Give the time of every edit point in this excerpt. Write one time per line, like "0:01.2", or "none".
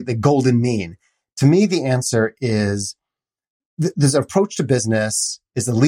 none